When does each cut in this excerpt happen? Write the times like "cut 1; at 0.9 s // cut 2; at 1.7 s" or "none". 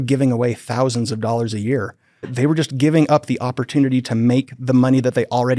cut 1; at 2.3 s